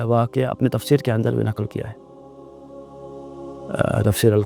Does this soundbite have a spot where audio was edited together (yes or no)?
no